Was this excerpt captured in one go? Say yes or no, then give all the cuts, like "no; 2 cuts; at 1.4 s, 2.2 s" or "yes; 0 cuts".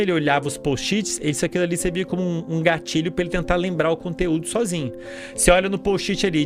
yes; 0 cuts